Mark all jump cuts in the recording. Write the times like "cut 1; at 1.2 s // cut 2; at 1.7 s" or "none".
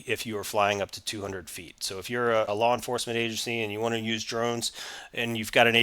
cut 1; at 2.5 s